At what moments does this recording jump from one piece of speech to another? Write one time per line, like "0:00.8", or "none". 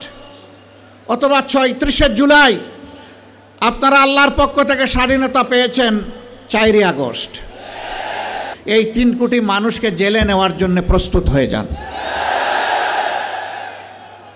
0:08.5